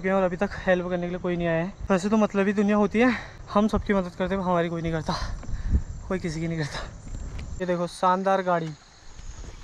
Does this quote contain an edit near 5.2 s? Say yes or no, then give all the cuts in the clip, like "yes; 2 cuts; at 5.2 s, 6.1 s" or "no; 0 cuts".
no; 3 cuts; at 1.8 s, 3.3 s, 7.4 s